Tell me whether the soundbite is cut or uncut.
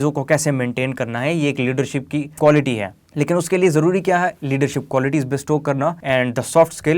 cut